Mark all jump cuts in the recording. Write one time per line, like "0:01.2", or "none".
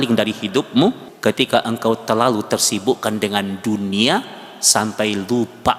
0:01.1